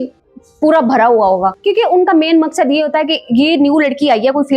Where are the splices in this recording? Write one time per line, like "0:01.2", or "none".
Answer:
0:01.5